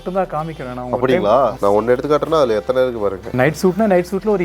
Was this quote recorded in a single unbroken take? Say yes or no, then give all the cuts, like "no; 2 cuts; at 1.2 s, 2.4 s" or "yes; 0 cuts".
no; 2 cuts; at 1.6 s, 3.2 s